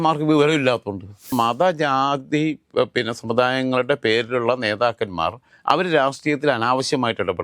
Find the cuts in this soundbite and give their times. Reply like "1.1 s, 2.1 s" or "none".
1.3 s